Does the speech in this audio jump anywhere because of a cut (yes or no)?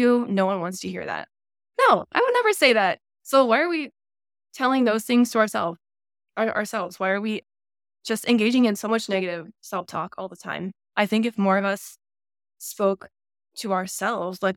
no